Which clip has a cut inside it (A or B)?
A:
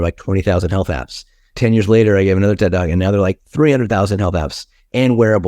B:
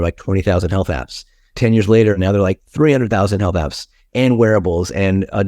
B